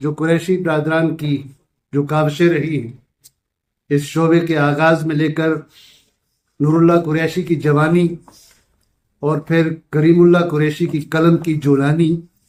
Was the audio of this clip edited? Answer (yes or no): no